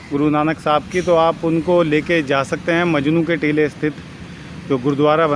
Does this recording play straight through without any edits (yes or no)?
yes